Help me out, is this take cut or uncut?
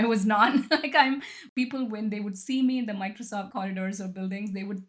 cut